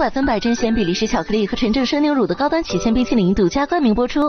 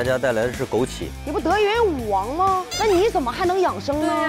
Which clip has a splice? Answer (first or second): second